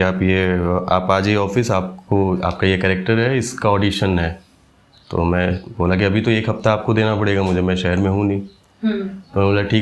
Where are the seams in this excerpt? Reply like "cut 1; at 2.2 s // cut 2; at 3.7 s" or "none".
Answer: none